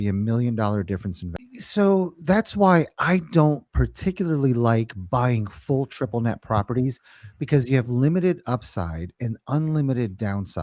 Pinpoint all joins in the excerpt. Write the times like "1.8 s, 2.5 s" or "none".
1.3 s